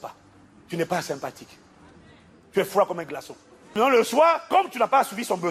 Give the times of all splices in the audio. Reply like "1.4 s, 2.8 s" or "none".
3.8 s, 4.4 s